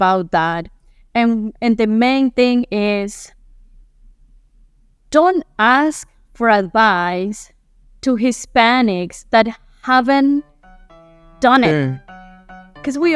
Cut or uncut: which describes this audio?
uncut